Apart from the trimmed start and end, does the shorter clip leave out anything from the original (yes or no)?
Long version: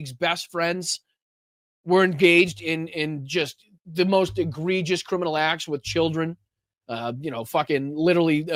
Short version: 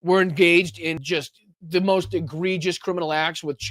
yes